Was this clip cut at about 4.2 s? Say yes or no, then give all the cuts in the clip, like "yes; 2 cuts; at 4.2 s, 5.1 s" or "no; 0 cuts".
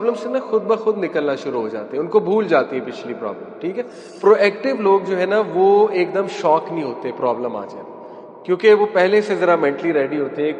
yes; 1 cut; at 4.2 s